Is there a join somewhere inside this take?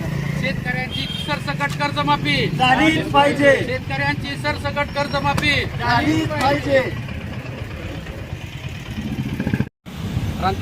yes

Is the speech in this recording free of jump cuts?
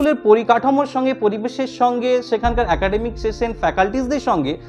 yes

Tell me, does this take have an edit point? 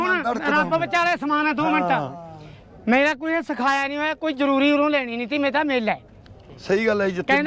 no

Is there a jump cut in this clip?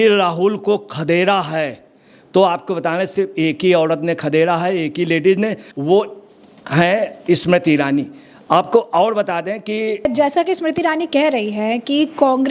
no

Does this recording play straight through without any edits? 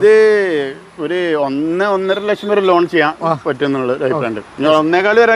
yes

